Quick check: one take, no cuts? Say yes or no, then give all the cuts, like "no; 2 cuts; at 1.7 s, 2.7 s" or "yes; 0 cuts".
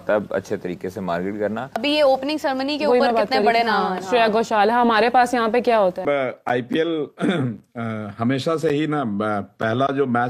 no; 2 cuts; at 1.7 s, 6.0 s